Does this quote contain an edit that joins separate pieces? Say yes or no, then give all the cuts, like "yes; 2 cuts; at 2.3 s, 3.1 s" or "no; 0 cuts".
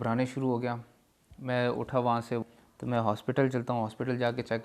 yes; 1 cut; at 2.4 s